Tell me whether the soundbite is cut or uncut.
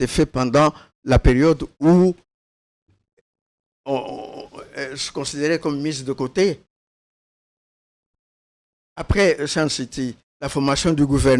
uncut